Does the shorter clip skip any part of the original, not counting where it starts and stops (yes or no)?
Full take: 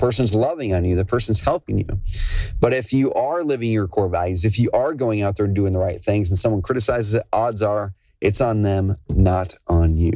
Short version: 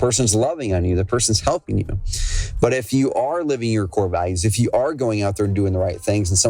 no